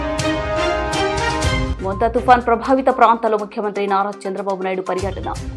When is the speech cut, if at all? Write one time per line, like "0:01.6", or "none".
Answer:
0:01.7